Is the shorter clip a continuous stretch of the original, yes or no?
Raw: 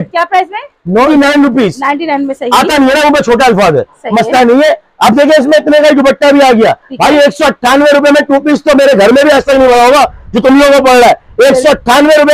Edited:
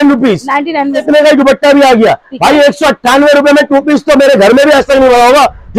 no